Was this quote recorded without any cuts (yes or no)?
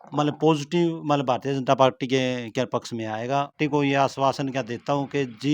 no